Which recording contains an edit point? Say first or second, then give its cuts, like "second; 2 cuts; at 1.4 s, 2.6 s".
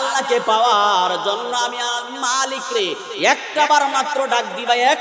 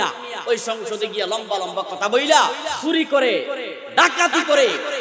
second; 1 cut; at 2.7 s